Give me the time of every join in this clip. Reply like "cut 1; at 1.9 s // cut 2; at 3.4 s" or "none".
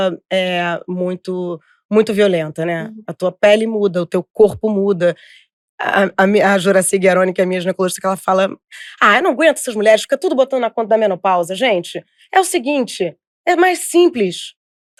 none